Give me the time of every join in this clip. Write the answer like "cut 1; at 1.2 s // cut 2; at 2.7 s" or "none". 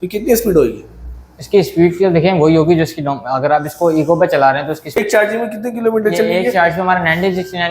cut 1; at 4.9 s